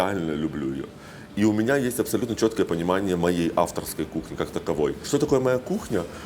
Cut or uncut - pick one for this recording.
uncut